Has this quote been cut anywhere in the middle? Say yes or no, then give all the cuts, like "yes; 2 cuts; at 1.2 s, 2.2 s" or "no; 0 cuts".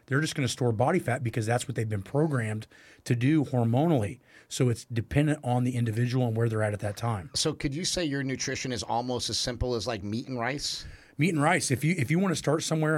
no; 0 cuts